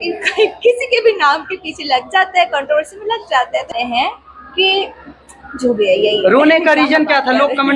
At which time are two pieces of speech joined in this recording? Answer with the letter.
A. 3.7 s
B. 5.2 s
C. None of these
A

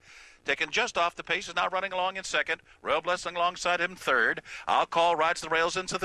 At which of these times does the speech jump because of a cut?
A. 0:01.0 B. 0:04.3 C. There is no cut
C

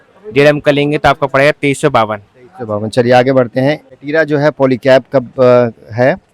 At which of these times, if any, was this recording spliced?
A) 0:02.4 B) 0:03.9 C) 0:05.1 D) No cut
B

